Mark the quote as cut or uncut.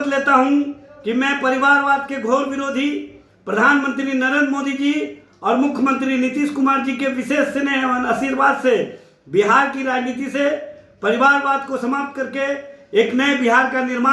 uncut